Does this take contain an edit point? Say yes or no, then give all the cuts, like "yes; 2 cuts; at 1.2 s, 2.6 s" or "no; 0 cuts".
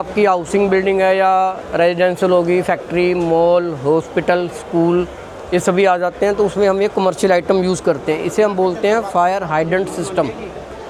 no; 0 cuts